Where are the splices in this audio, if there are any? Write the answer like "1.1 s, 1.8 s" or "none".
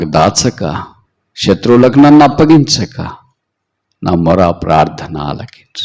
none